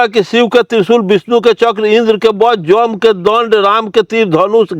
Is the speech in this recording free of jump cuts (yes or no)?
yes